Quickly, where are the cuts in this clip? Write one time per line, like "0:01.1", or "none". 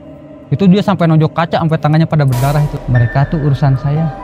0:02.8